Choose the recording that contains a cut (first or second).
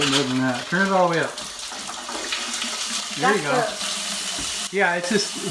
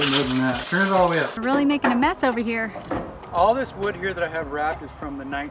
second